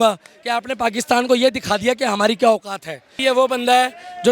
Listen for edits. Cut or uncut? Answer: cut